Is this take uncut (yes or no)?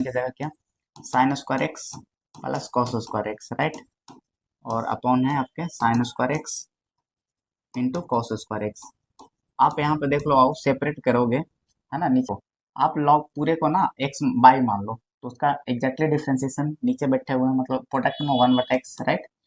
no